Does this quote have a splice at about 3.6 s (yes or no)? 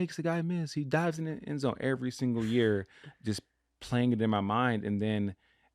no